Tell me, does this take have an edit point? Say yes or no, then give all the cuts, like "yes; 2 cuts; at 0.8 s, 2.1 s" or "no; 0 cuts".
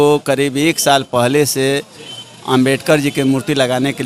no; 0 cuts